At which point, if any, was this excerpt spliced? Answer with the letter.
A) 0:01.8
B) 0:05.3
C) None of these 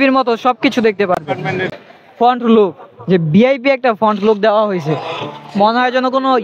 A